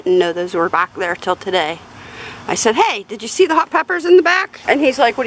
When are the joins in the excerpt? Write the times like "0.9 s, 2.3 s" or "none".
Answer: none